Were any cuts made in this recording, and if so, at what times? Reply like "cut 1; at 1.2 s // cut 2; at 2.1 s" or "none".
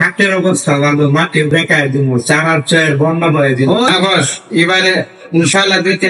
cut 1; at 3.9 s